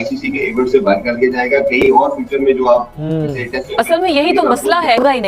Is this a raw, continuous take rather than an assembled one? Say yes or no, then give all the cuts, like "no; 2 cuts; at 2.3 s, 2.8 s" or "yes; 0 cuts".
yes; 0 cuts